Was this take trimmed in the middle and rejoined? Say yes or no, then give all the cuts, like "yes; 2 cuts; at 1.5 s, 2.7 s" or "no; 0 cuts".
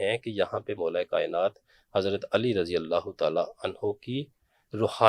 no; 0 cuts